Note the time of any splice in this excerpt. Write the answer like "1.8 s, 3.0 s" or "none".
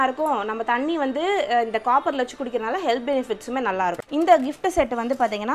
4.0 s